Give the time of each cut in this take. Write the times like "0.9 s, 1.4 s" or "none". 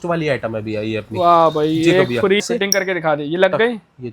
2.4 s